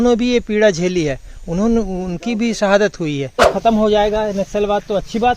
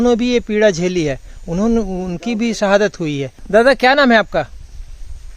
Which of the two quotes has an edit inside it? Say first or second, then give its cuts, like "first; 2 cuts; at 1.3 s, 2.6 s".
first; 1 cut; at 3.4 s